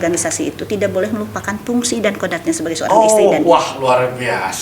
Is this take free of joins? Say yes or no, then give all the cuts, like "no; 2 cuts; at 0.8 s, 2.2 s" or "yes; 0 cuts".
yes; 0 cuts